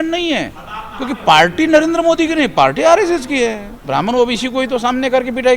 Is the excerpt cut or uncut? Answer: cut